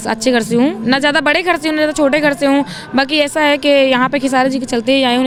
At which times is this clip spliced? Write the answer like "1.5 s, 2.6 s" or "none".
none